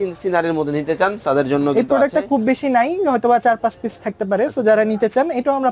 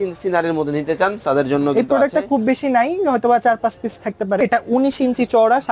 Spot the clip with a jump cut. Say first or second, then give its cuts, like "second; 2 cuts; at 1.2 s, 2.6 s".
second; 1 cut; at 4.4 s